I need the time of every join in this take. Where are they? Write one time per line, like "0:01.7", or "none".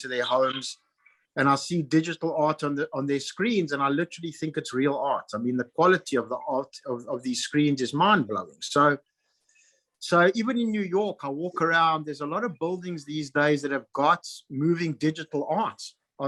none